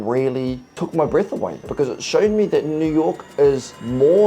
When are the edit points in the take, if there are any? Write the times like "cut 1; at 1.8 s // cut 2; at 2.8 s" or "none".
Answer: cut 1; at 1.7 s